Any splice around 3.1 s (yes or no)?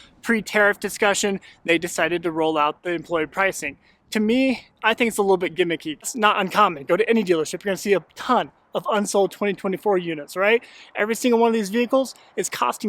no